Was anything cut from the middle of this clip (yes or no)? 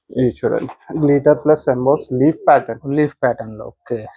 no